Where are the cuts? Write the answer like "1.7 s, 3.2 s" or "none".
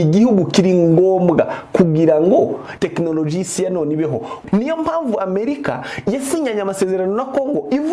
2.7 s, 4.4 s